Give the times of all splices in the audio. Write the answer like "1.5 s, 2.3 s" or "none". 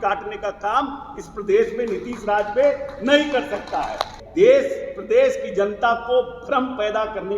4.2 s